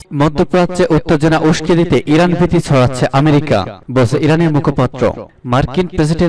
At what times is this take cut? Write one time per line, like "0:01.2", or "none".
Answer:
none